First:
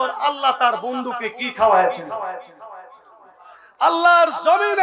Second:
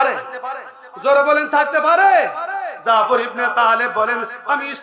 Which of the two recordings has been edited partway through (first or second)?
second